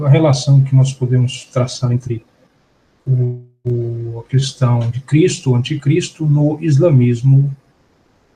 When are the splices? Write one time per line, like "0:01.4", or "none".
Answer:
none